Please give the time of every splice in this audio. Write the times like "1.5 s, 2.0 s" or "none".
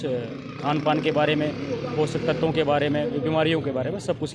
none